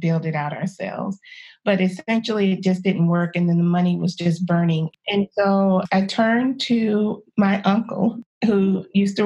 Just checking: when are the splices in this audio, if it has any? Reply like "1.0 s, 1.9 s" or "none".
4.9 s, 5.8 s, 7.2 s, 8.3 s